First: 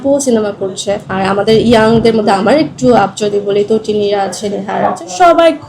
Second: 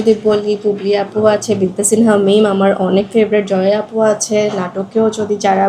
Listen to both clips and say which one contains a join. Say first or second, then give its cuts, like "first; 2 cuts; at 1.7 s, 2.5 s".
first; 1 cut; at 1.1 s